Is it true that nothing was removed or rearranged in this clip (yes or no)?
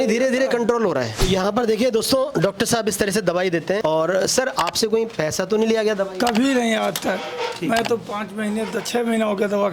no